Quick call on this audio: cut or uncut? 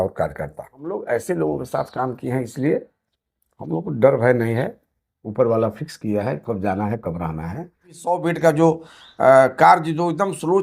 cut